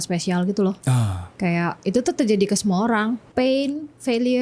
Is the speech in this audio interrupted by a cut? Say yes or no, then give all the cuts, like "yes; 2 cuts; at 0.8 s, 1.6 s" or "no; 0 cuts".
yes; 1 cut; at 3.3 s